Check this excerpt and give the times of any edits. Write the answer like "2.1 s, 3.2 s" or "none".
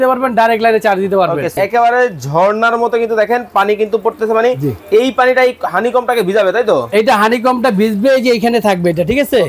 1.5 s